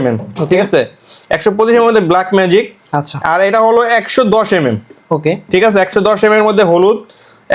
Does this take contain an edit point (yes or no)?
no